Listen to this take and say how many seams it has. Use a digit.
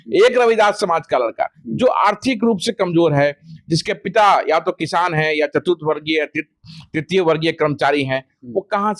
0